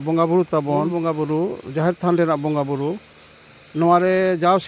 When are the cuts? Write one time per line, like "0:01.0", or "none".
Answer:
0:00.9